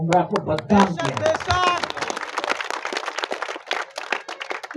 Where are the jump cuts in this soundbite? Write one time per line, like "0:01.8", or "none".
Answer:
none